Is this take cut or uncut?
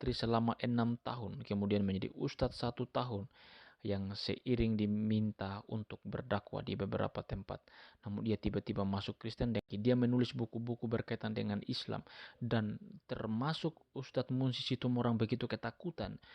cut